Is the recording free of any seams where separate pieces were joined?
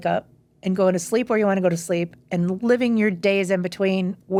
yes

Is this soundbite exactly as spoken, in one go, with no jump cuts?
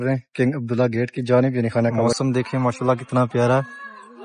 no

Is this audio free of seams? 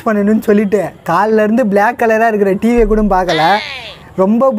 yes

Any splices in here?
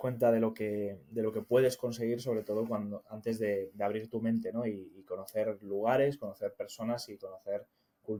no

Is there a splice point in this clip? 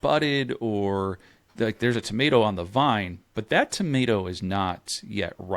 no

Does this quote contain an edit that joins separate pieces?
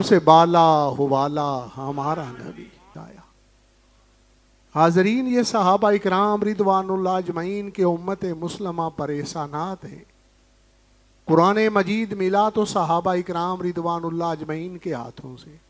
yes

